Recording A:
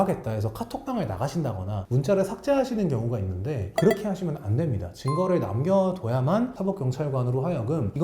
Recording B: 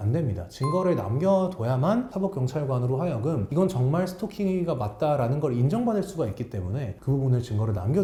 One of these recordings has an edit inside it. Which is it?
A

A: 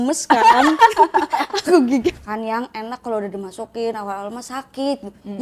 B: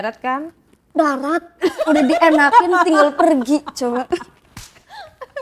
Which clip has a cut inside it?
A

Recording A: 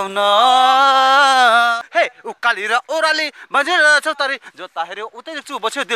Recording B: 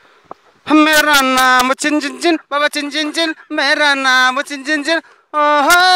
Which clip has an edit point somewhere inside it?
A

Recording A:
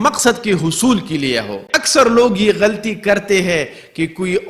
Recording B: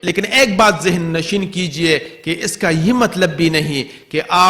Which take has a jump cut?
A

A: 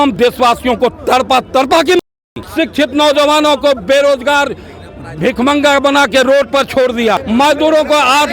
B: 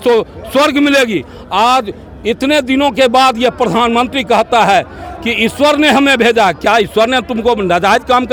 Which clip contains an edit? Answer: A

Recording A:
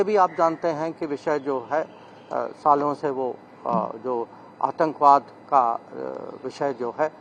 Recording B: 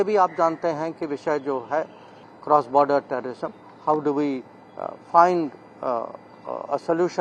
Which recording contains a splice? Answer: B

